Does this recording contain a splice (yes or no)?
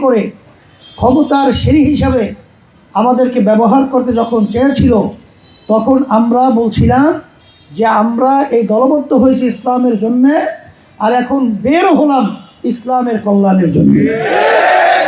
no